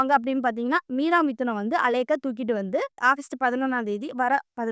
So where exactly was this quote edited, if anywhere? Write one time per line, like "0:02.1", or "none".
0:03.0